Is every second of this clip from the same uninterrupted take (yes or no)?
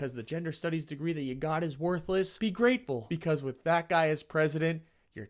no